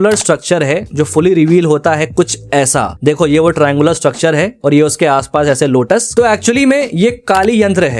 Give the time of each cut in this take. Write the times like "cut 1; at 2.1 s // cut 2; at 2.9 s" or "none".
cut 1; at 6.1 s